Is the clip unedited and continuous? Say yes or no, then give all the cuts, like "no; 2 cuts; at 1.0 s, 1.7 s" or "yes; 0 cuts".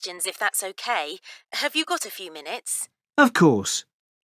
yes; 0 cuts